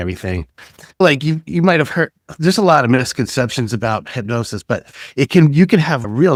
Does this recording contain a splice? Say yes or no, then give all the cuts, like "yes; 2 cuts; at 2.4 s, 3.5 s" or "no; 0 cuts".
no; 0 cuts